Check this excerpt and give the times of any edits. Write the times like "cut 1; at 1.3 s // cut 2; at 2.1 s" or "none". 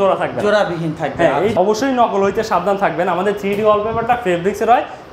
cut 1; at 1.5 s